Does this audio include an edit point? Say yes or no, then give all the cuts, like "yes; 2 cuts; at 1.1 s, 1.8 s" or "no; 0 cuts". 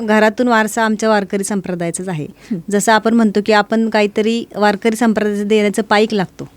no; 0 cuts